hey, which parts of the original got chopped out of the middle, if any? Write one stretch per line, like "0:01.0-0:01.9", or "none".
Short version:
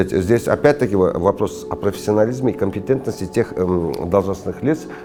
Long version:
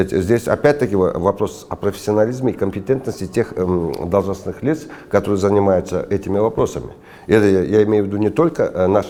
none